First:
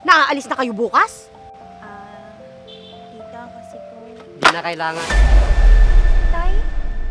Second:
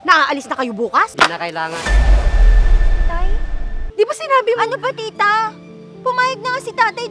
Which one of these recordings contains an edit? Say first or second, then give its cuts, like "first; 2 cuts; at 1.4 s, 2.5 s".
second; 2 cuts; at 1.1 s, 3.8 s